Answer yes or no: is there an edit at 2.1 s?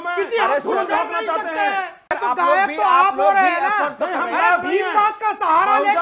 yes